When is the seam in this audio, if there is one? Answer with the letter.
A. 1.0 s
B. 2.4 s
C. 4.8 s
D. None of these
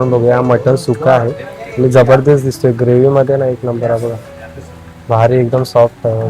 D